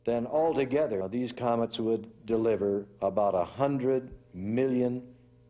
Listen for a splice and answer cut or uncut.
cut